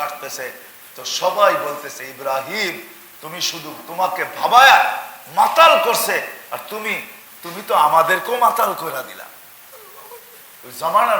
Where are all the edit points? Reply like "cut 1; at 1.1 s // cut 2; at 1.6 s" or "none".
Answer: none